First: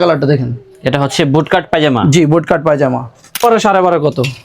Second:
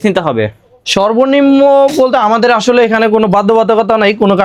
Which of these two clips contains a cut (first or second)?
first